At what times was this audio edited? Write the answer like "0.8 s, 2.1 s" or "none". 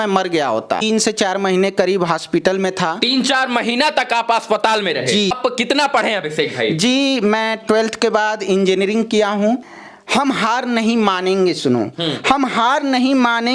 0.8 s, 5.4 s, 9.6 s